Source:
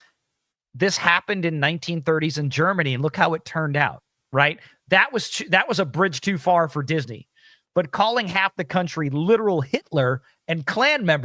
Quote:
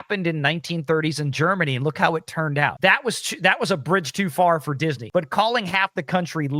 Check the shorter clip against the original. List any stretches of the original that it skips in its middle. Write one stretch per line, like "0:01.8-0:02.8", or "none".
0:03.9-0:04.8
0:07.1-0:07.6